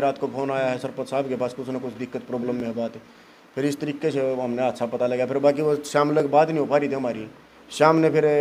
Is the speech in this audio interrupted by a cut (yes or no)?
no